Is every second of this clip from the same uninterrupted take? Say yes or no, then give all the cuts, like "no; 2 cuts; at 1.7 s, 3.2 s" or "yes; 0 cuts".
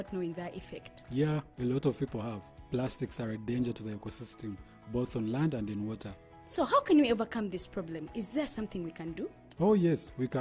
yes; 0 cuts